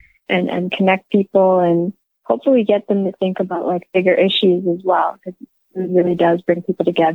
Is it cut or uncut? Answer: cut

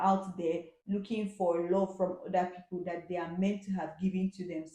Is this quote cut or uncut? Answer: uncut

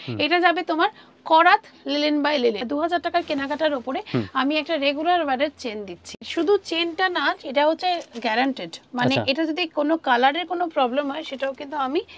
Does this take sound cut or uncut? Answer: cut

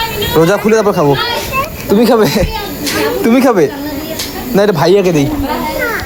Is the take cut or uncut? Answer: uncut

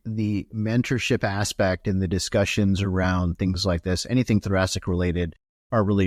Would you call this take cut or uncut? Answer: uncut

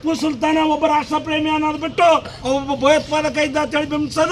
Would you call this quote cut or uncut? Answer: uncut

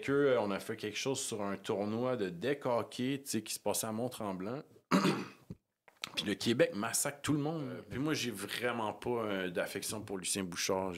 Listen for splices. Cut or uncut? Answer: cut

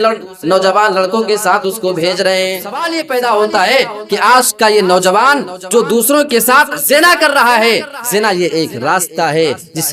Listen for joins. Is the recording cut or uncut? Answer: cut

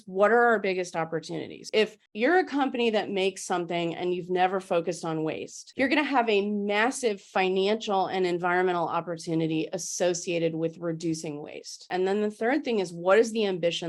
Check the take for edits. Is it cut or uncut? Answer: uncut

